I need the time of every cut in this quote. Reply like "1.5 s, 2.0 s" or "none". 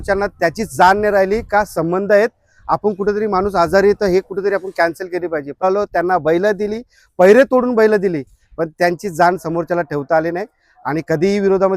5.6 s